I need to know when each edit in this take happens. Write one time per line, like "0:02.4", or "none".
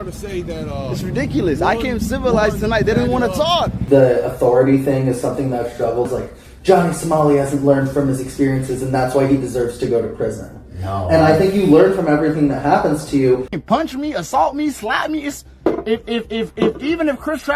0:03.8
0:13.5